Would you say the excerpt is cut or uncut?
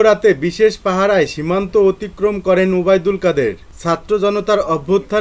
uncut